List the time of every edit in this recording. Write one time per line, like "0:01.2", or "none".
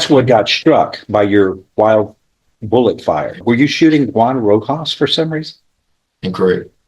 0:03.4